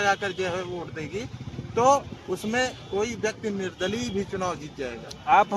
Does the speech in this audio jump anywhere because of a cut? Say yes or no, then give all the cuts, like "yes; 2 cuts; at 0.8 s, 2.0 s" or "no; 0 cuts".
yes; 1 cut; at 3.0 s